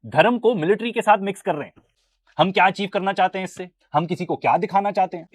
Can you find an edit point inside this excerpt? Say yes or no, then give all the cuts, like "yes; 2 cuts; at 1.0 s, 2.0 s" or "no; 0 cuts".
no; 0 cuts